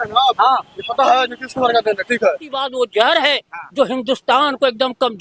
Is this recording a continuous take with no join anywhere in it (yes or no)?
no